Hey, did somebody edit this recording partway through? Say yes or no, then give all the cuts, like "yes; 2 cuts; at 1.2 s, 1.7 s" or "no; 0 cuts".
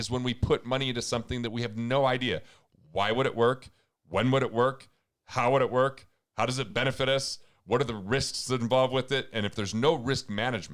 no; 0 cuts